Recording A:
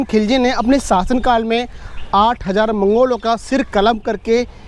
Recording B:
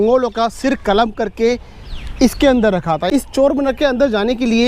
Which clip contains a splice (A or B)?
B